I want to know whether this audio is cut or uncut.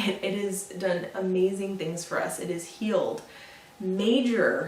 uncut